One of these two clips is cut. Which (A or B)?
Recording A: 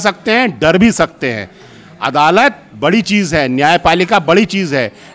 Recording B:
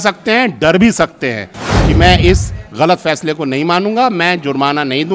B